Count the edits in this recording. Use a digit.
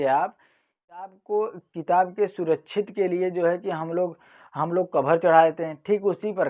1